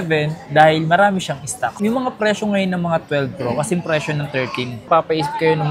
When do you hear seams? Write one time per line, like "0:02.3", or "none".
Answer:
0:01.7